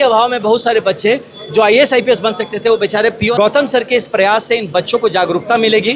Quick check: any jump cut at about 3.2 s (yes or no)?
yes